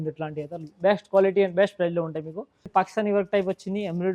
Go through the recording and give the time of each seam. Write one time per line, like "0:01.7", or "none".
0:02.7